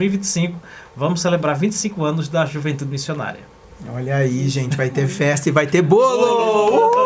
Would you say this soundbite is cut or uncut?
uncut